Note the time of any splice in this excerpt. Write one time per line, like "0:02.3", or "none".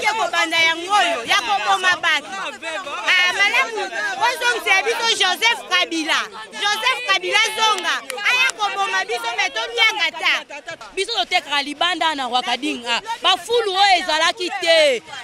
0:10.7